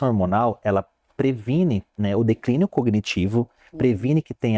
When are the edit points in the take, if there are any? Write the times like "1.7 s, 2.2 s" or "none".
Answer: none